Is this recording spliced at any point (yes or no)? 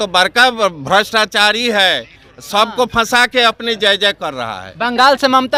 no